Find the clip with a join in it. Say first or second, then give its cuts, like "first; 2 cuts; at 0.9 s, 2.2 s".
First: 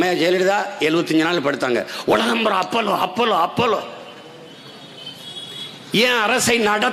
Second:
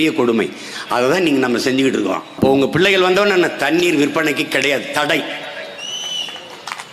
second; 1 cut; at 2.3 s